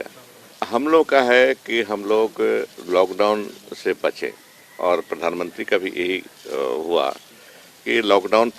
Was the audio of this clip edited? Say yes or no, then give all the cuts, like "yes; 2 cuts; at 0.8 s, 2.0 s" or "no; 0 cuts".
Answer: no; 0 cuts